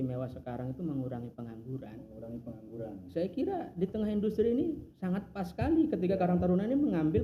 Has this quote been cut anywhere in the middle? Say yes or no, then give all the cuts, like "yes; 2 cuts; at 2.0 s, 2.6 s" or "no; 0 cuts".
no; 0 cuts